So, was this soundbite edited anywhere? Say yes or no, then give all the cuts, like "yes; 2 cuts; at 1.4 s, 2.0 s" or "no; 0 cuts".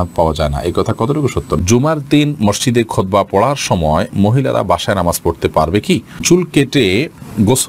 yes; 2 cuts; at 1.6 s, 6.2 s